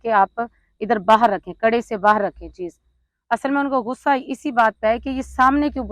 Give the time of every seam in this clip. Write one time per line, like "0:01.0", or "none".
none

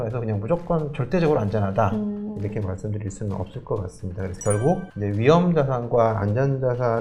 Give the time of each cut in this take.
none

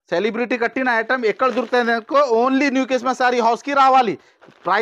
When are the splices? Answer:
none

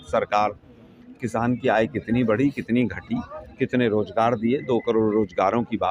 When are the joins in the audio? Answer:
none

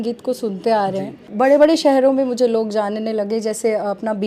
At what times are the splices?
0:01.3

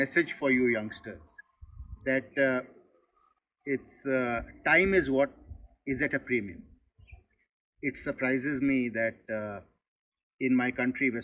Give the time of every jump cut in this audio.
none

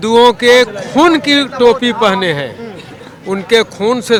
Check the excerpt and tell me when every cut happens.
none

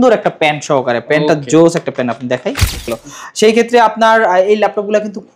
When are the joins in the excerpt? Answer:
0:02.9

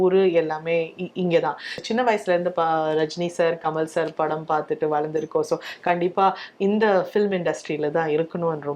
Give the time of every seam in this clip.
0:01.8

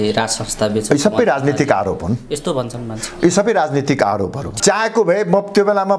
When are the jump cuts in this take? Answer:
0:04.4

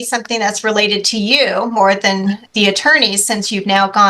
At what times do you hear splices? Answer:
0:02.4

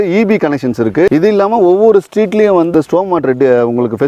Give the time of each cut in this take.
0:01.1
0:02.7

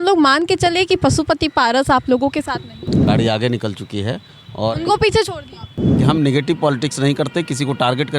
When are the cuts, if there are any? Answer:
0:03.0
0:06.0

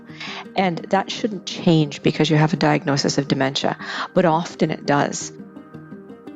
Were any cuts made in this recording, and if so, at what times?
0:05.4

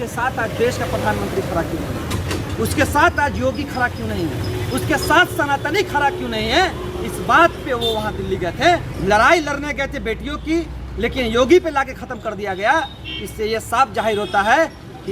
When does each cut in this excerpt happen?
0:08.9

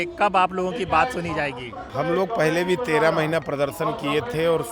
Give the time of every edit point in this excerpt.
0:01.7

